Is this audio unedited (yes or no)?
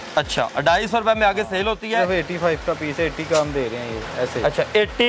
no